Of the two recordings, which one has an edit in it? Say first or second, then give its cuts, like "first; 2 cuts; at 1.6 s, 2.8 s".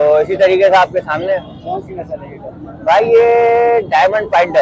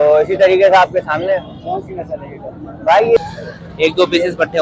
second; 1 cut; at 3.2 s